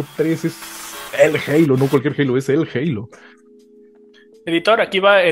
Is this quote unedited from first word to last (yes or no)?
yes